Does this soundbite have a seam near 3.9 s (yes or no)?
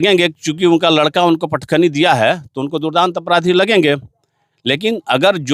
no